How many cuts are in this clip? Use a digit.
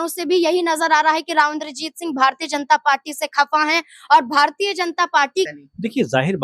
1